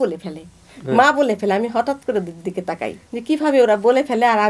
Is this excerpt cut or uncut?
cut